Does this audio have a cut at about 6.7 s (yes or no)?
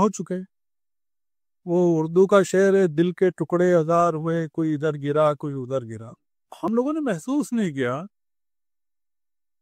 yes